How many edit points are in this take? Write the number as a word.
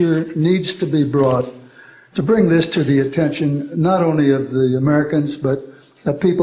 zero